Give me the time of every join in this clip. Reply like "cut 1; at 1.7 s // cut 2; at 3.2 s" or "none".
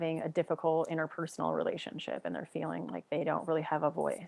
none